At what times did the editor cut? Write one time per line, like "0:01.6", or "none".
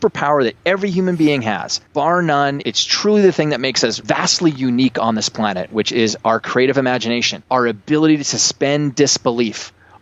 0:01.7
0:02.6
0:04.0
0:07.3